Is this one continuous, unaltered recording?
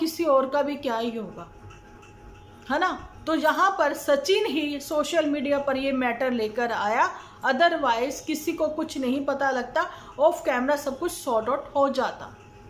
yes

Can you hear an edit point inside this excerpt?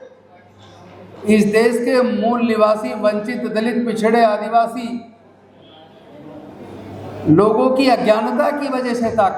no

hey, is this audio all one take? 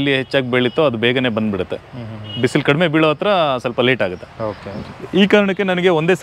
yes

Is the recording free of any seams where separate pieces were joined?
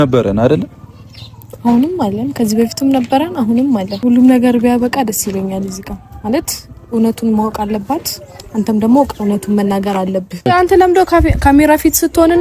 no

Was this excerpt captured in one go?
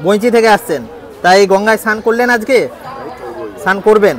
yes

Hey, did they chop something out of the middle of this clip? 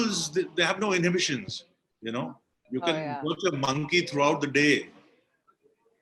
yes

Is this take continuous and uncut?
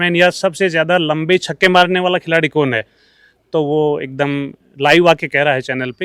yes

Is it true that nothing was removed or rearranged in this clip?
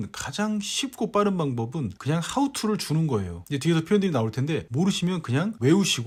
yes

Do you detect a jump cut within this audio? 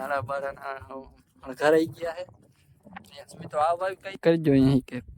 yes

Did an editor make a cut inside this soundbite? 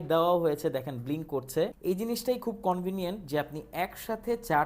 yes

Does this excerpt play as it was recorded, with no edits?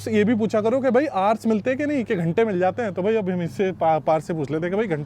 yes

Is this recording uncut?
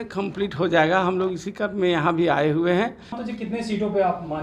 no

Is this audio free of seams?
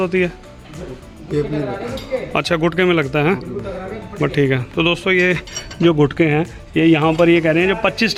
yes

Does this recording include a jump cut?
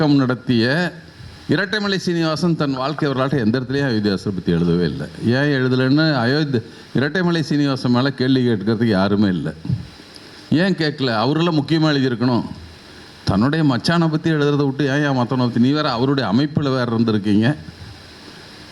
no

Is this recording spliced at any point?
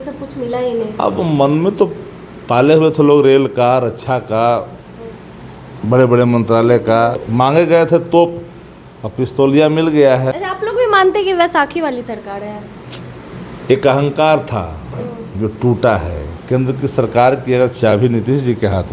yes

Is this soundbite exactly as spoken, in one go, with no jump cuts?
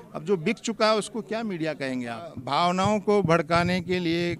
no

